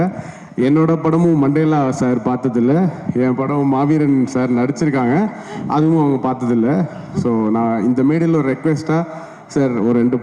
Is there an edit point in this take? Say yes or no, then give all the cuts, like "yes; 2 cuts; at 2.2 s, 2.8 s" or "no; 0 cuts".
no; 0 cuts